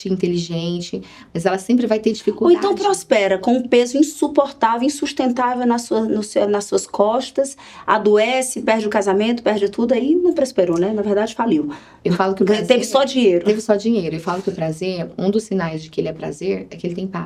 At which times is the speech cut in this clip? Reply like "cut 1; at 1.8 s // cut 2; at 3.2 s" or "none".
none